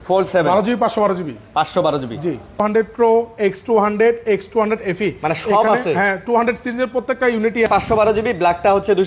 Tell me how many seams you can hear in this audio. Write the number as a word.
two